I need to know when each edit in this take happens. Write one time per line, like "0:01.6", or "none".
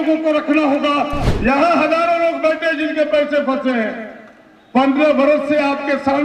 0:01.2